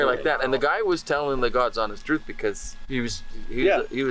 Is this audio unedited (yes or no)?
no